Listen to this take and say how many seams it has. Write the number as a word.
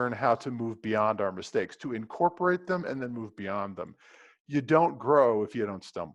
zero